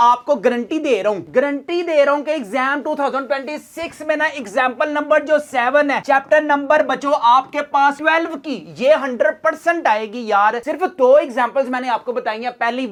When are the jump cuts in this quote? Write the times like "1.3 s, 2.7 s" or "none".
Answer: none